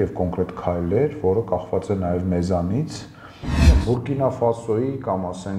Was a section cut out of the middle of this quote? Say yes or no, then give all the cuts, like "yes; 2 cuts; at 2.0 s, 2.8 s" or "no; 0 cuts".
yes; 1 cut; at 3.5 s